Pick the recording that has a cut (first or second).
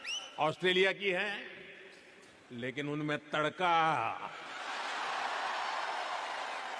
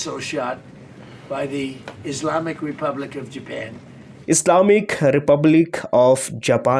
second